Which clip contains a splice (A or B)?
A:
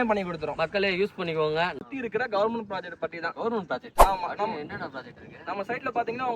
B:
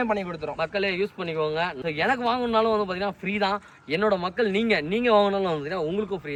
A